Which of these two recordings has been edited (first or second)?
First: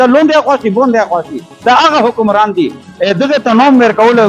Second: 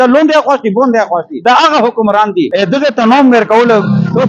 second